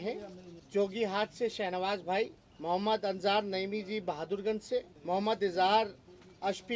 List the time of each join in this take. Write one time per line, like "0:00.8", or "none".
0:04.9